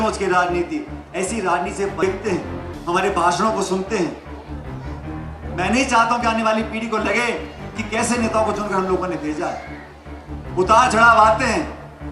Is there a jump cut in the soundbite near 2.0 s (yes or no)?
yes